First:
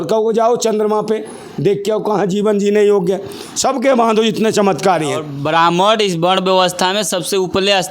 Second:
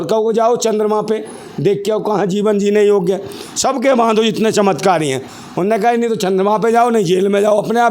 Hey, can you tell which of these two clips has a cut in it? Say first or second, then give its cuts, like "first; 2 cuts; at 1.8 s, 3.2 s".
first; 1 cut; at 5.3 s